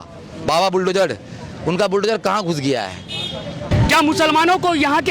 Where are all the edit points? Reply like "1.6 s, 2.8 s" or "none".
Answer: 3.7 s